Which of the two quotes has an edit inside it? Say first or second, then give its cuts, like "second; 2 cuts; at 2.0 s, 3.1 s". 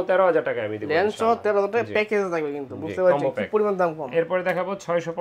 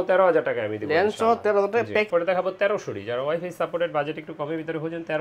second; 1 cut; at 2.1 s